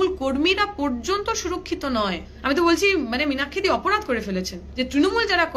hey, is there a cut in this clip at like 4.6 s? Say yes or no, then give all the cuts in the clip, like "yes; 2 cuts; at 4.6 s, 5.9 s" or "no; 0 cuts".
yes; 2 cuts; at 2.3 s, 4.6 s